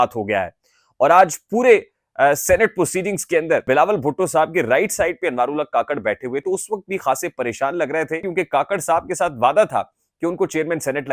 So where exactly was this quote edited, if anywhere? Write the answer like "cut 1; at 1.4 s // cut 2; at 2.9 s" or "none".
cut 1; at 3.6 s // cut 2; at 6.4 s // cut 3; at 8.3 s